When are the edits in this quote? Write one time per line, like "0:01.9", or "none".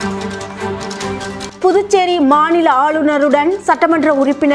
0:01.5